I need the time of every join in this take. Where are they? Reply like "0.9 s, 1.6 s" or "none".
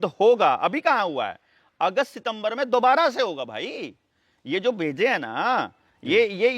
none